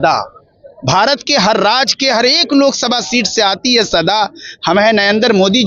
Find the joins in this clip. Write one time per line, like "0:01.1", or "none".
none